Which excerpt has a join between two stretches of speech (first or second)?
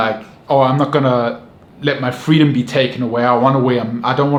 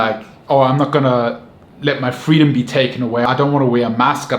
second